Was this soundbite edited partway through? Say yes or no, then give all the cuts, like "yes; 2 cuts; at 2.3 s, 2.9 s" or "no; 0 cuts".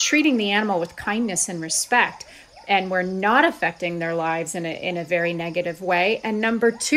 no; 0 cuts